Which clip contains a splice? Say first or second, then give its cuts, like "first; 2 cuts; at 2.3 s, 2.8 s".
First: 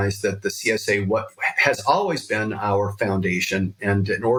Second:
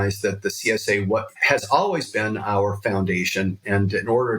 second; 1 cut; at 1.3 s